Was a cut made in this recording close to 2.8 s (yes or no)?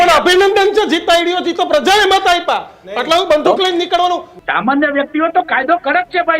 no